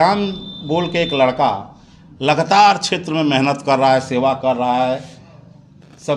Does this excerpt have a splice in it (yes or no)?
no